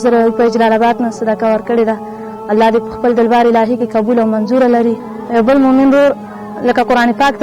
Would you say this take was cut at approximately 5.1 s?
yes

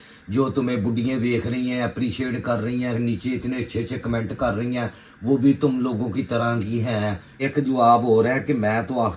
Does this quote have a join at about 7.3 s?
yes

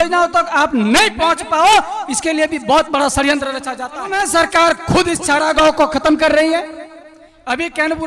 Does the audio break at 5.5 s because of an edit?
no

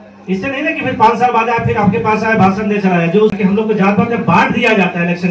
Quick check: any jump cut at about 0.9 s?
no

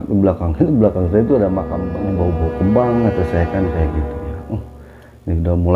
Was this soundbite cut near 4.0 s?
no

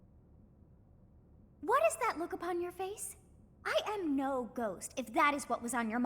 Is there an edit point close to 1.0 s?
yes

